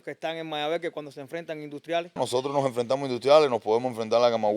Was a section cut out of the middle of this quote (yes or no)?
yes